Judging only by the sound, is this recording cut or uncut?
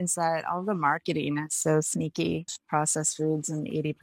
cut